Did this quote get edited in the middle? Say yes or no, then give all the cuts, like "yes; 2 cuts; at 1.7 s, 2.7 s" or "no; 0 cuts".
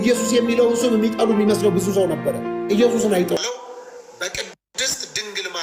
yes; 1 cut; at 3.4 s